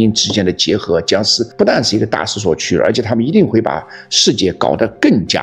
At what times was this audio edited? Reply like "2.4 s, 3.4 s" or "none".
1.4 s